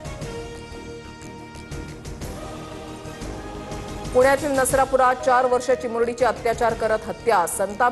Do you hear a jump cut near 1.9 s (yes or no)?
yes